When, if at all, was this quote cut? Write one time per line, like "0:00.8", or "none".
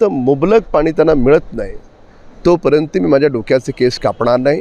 none